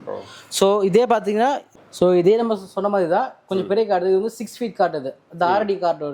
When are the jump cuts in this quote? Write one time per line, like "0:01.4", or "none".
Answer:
0:01.7